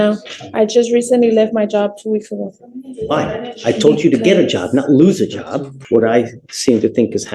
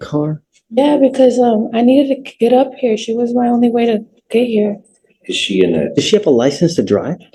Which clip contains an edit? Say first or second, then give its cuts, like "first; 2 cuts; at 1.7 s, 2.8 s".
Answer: first; 1 cut; at 5.8 s